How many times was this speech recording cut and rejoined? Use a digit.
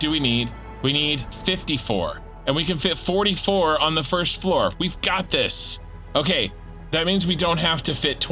3